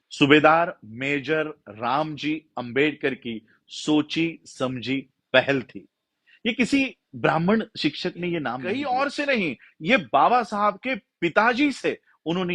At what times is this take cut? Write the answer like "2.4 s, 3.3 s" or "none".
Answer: 8.5 s